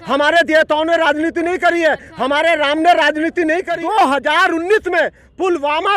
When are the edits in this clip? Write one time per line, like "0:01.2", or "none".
0:03.7